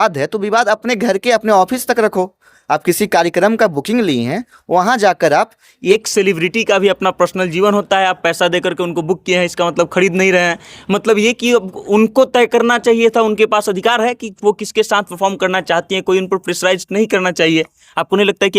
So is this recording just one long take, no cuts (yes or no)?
no